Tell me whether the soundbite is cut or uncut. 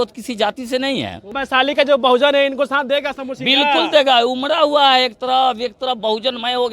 cut